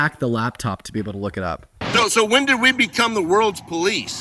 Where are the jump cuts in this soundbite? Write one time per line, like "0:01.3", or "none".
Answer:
0:01.8